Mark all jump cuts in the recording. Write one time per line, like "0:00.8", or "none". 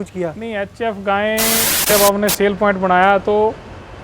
0:01.9